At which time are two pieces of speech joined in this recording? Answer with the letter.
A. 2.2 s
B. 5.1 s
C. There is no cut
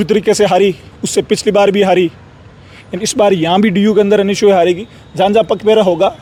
C